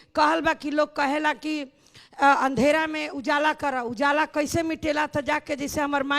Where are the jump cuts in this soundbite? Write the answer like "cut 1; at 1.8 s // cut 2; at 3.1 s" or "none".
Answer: none